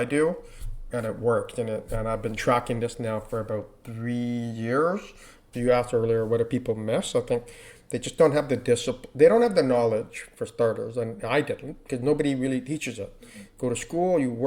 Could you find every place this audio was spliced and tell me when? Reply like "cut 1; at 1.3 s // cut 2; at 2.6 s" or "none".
cut 1; at 5.4 s